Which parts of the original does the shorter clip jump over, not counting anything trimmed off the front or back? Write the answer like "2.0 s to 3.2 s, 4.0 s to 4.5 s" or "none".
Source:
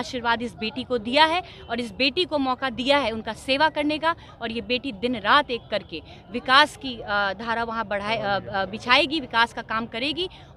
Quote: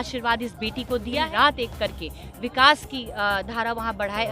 1.2 s to 5.1 s